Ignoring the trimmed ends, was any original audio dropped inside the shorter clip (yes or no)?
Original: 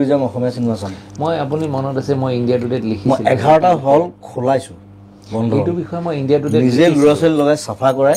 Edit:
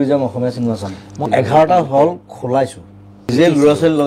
yes